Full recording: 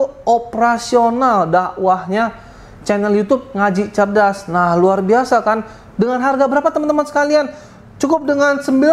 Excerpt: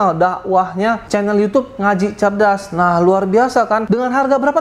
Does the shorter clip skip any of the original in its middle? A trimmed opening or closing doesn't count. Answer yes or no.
yes